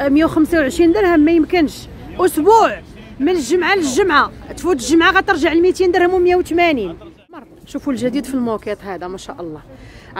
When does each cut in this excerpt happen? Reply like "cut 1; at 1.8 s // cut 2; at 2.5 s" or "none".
cut 1; at 7.4 s